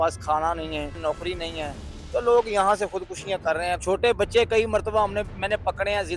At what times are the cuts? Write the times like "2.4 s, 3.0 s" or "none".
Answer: 0.9 s, 3.8 s